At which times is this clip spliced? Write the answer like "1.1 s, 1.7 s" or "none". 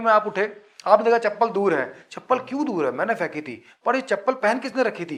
none